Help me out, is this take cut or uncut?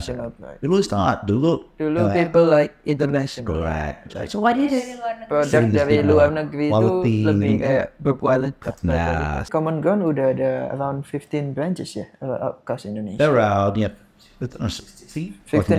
cut